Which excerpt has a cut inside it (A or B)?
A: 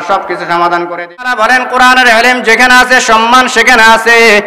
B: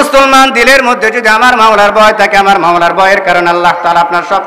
A